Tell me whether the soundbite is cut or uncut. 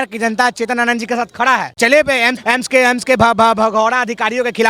cut